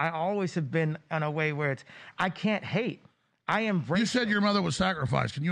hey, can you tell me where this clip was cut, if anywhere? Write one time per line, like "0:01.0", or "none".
0:03.6